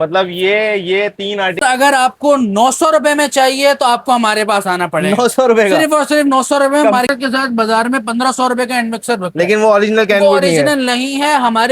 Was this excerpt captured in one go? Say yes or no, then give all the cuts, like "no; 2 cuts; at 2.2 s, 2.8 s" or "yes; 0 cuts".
no; 2 cuts; at 1.6 s, 7.1 s